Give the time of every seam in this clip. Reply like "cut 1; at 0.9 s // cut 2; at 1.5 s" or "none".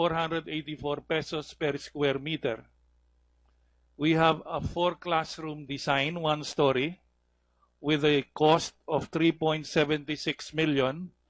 cut 1; at 8.3 s